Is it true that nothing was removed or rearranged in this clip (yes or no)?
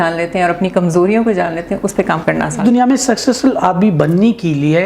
no